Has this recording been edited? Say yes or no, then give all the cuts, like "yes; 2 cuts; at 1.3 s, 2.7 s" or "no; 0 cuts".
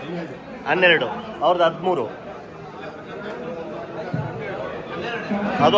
no; 0 cuts